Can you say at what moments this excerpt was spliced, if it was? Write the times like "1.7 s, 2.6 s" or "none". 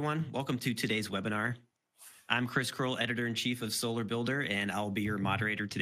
2.8 s